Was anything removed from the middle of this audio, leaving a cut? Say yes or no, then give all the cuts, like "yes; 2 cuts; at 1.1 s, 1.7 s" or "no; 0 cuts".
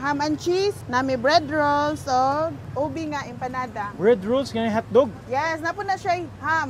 yes; 2 cuts; at 0.8 s, 2.6 s